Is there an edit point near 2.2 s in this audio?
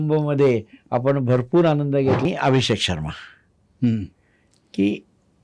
yes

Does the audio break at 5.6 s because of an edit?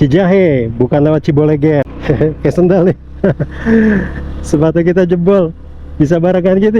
no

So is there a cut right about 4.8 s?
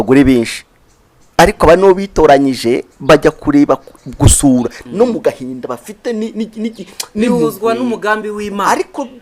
yes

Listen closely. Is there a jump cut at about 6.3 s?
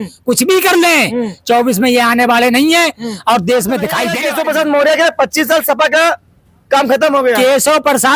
no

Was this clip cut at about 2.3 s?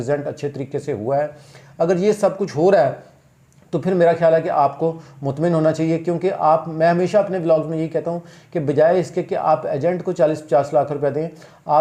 no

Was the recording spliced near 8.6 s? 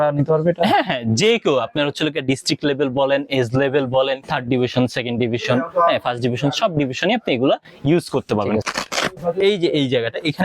yes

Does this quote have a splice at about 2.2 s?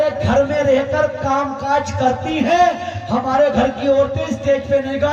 no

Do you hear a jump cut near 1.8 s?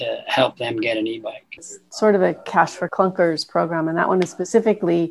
yes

